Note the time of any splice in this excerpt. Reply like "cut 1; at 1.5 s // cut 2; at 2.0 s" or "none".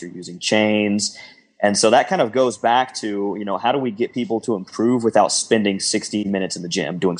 cut 1; at 6.2 s